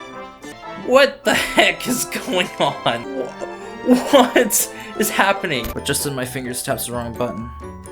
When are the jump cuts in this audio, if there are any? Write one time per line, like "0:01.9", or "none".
0:05.7